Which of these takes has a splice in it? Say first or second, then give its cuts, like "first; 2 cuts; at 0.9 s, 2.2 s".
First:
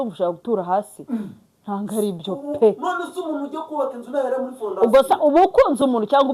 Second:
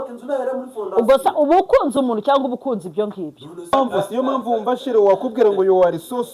second; 1 cut; at 3.7 s